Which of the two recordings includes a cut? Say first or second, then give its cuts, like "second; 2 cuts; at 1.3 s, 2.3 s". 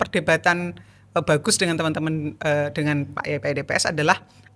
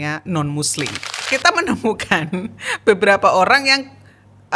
second; 1 cut; at 1.1 s